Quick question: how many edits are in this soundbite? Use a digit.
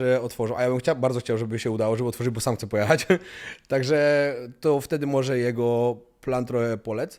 0